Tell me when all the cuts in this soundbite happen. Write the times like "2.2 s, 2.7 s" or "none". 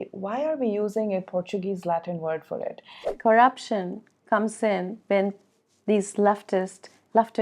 3.1 s